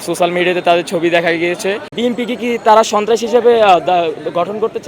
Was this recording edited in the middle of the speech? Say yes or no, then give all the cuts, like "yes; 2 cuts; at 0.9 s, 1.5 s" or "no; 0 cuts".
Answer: yes; 1 cut; at 1.9 s